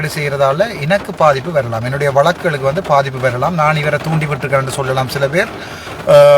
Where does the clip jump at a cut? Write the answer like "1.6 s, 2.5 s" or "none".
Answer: none